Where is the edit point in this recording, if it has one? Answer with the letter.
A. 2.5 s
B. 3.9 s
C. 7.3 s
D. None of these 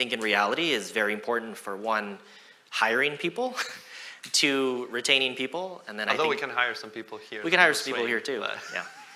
D